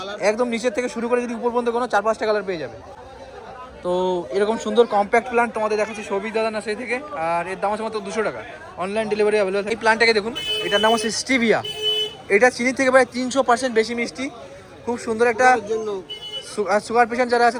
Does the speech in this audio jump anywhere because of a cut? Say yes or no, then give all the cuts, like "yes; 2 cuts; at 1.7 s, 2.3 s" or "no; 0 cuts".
no; 0 cuts